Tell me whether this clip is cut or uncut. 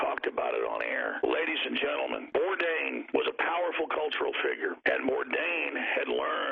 cut